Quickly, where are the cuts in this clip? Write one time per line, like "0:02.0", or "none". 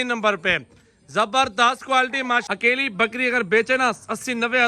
0:02.4